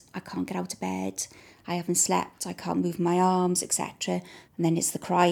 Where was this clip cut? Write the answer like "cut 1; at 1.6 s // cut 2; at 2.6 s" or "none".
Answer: cut 1; at 4.4 s